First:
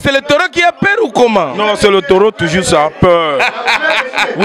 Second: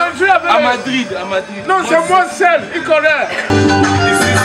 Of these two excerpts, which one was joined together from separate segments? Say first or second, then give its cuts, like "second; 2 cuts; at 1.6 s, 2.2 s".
second; 1 cut; at 3.4 s